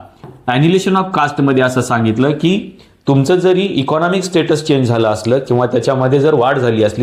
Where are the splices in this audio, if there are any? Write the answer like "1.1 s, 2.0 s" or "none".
none